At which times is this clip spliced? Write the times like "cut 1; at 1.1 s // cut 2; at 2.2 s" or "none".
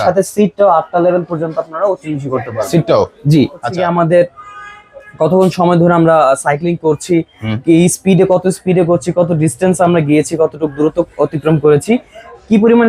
cut 1; at 3.7 s